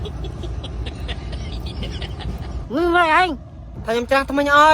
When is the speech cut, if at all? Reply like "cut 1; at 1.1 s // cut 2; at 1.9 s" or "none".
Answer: cut 1; at 2.6 s

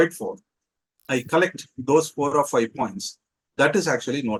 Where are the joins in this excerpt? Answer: none

